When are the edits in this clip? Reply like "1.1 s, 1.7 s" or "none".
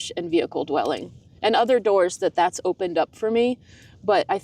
none

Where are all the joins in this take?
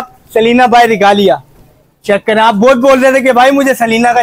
none

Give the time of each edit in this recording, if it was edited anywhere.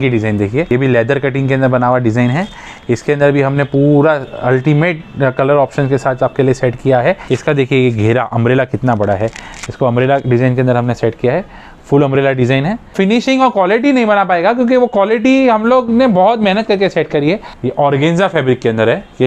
0.7 s, 7.2 s, 12.9 s, 17.5 s

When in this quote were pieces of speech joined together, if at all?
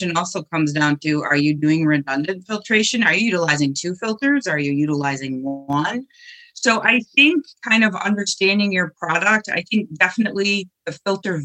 none

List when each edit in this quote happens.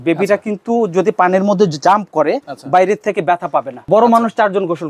3.8 s

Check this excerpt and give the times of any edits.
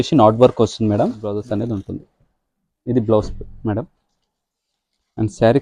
1.3 s

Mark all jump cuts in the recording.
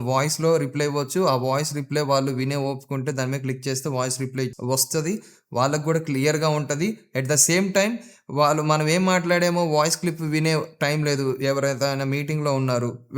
4.5 s

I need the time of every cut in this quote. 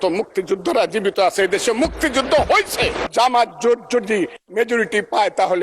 3.0 s

